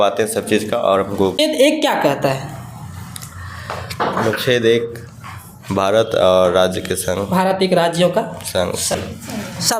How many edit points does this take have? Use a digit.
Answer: 2